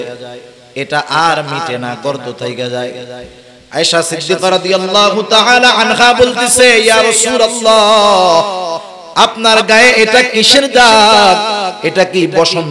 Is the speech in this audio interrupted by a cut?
no; 0 cuts

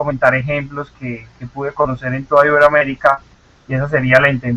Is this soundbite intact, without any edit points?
no; 1 cut; at 1.8 s

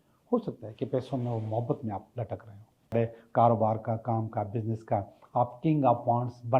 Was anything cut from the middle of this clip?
yes; 1 cut; at 2.9 s

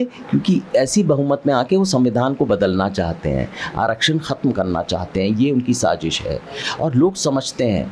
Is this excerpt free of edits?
yes; 0 cuts

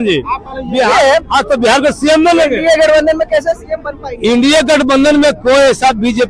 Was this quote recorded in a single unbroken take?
yes; 0 cuts

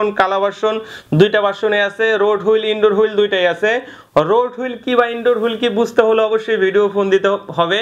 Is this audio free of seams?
yes; 0 cuts

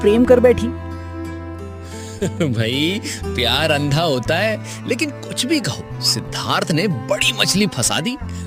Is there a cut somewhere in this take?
no; 0 cuts

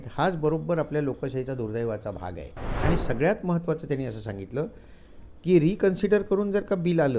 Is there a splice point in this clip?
yes; 1 cut; at 2.8 s

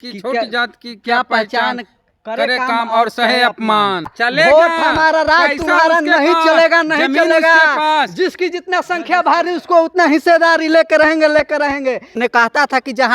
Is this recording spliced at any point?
yes; 2 cuts; at 4.1 s, 12.2 s

